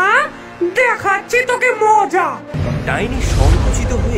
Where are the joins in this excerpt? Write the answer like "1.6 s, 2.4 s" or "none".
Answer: 2.5 s